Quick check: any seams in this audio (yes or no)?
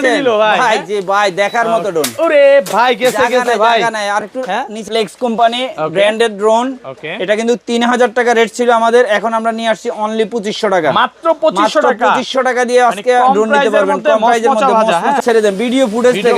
yes